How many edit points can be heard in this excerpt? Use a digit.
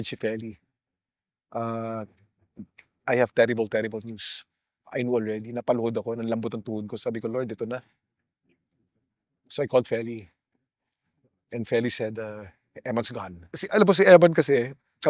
1